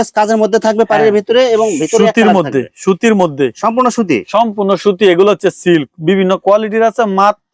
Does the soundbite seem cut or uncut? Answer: uncut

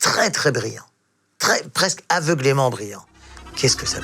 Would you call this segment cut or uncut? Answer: uncut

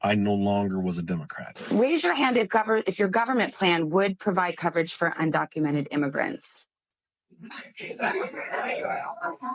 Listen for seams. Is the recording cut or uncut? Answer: uncut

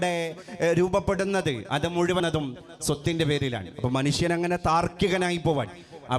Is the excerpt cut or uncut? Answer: cut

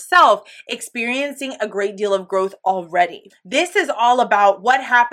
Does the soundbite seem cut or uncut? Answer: cut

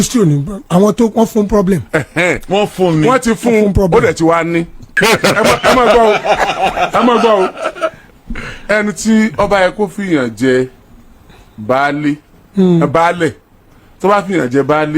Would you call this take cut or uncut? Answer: cut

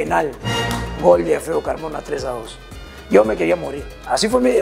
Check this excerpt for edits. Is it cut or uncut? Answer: uncut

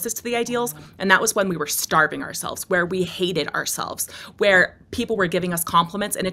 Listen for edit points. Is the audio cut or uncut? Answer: uncut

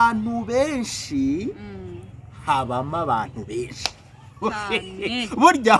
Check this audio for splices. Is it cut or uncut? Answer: uncut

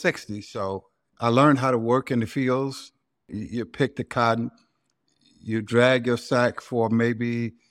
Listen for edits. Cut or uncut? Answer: cut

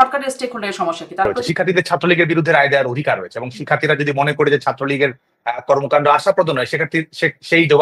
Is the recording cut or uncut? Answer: cut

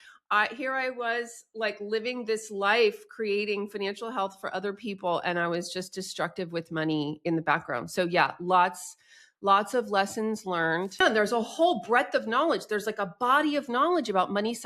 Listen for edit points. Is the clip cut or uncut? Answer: cut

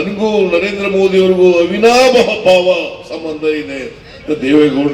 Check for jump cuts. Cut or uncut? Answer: uncut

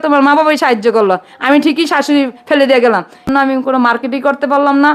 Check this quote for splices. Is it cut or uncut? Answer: cut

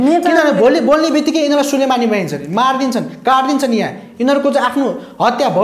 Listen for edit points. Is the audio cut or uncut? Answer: uncut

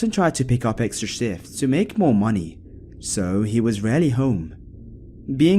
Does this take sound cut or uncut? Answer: cut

